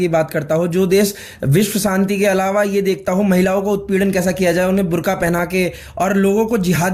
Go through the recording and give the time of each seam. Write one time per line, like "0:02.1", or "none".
none